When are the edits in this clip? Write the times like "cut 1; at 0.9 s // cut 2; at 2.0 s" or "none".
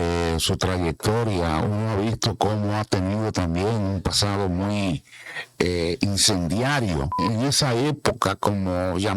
cut 1; at 7.2 s